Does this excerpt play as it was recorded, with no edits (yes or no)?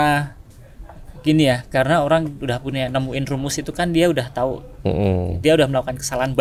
yes